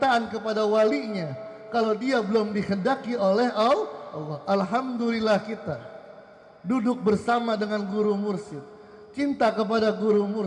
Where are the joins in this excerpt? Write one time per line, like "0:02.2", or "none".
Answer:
none